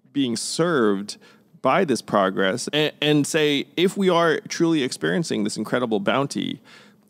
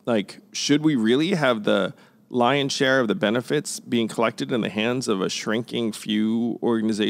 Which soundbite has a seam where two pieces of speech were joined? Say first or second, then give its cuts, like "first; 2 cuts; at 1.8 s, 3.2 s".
first; 1 cut; at 2.6 s